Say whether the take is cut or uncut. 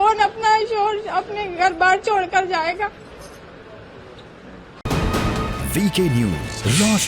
uncut